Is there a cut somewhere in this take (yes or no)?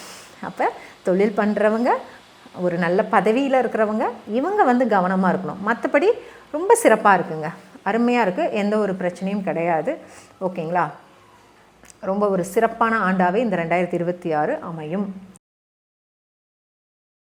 no